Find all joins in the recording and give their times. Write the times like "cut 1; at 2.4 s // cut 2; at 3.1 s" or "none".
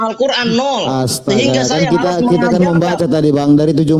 none